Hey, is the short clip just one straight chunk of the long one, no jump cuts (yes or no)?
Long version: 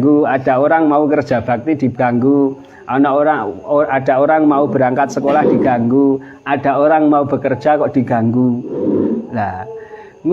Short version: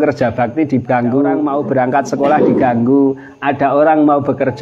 no